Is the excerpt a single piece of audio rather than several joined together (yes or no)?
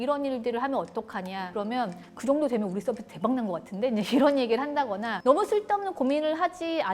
no